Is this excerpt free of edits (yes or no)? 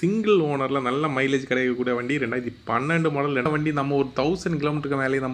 no